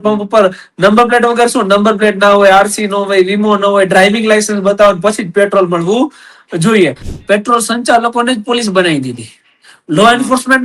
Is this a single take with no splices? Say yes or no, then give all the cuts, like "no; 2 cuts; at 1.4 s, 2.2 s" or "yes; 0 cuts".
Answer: no; 1 cut; at 7.1 s